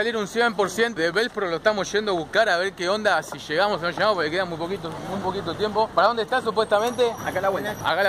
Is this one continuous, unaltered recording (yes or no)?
no